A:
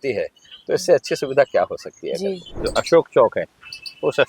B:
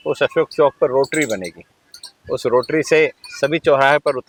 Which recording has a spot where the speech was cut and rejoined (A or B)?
A